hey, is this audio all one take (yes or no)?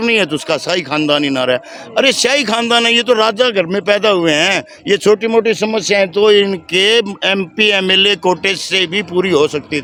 yes